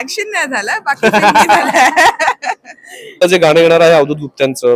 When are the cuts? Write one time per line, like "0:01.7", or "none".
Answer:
0:03.2